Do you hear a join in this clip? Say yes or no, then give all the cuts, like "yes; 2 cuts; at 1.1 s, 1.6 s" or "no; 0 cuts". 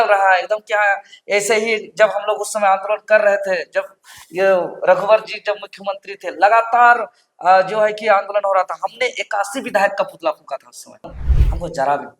yes; 1 cut; at 11.2 s